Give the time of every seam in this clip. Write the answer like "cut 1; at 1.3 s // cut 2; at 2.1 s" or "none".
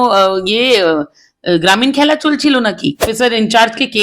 cut 1; at 3.1 s